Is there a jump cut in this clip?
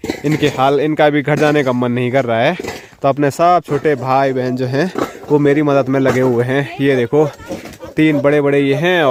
no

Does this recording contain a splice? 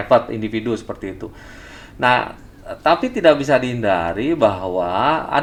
no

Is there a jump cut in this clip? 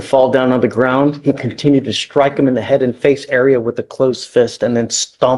no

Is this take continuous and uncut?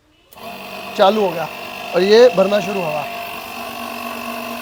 yes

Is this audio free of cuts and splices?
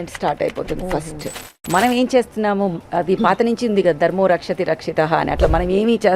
no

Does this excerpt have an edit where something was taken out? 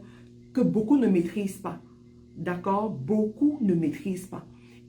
no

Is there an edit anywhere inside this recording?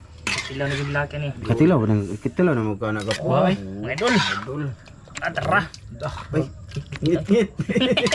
no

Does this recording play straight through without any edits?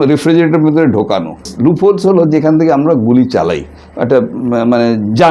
no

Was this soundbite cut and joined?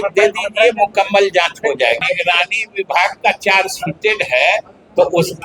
yes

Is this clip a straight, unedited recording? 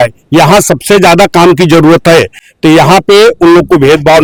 yes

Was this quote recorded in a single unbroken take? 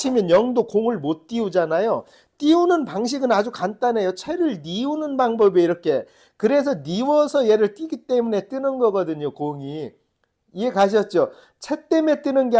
yes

